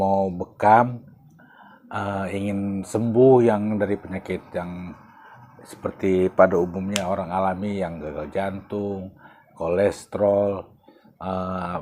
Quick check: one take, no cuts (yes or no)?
yes